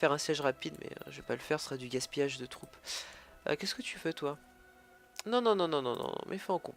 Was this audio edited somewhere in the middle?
no; 0 cuts

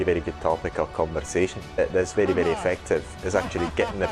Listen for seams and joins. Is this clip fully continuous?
no; 1 cut; at 1.8 s

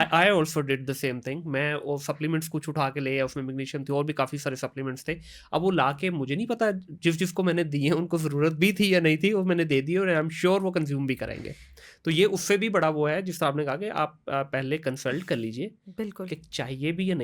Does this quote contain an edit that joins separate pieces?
no; 0 cuts

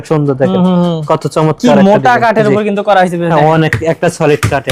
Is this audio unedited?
yes; 0 cuts

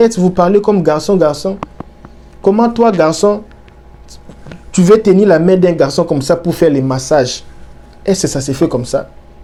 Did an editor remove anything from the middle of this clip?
no; 0 cuts

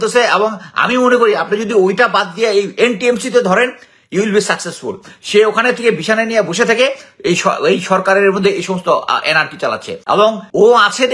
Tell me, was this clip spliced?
yes; 1 cut; at 10.2 s

